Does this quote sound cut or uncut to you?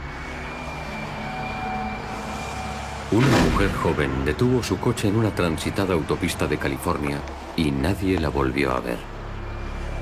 uncut